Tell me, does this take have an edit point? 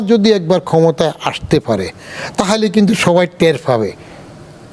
no; 0 cuts

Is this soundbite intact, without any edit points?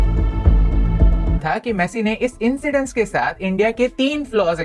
no; 1 cut; at 1.6 s

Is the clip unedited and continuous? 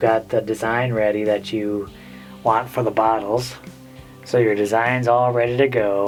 yes; 0 cuts

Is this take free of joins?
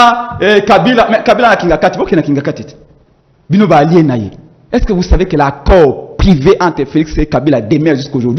yes; 0 cuts

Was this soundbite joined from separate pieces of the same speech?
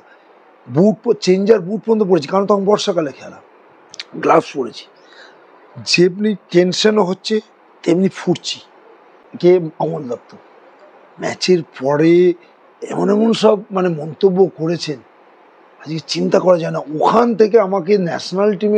yes; 1 cut; at 9.2 s

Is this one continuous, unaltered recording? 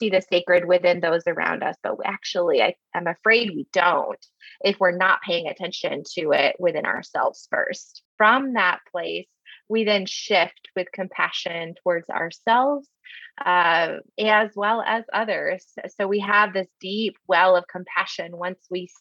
no; 1 cut; at 8.1 s

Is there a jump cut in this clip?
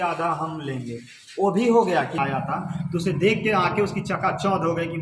yes; 1 cut; at 2.2 s

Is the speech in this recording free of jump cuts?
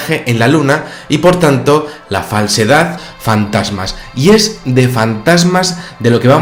yes; 0 cuts

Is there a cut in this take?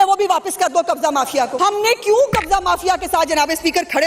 yes; 1 cut; at 1.5 s

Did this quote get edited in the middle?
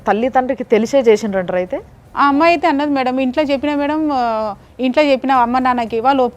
no; 0 cuts

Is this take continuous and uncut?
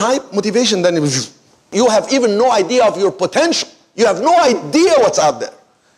no; 1 cut; at 1.7 s

